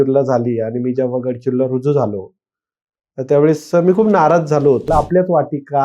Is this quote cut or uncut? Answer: cut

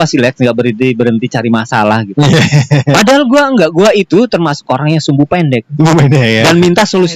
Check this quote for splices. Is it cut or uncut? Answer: uncut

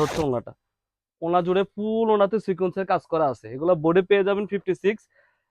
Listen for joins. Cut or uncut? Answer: uncut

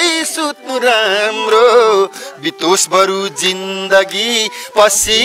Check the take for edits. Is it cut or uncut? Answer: uncut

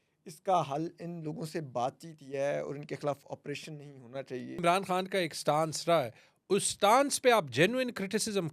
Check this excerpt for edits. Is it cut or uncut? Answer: cut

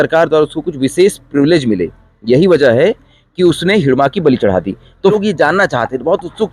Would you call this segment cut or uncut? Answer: cut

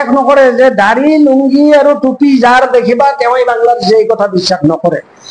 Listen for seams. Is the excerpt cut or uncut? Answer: uncut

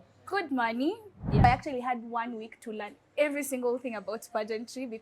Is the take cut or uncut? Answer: cut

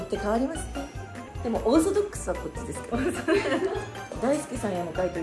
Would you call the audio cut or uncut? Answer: cut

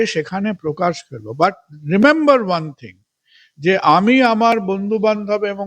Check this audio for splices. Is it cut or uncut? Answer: uncut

